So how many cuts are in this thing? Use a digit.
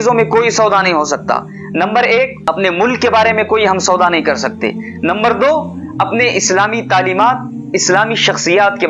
1